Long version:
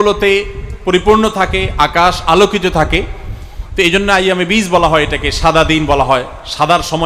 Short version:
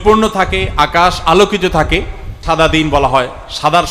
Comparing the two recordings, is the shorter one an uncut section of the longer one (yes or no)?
no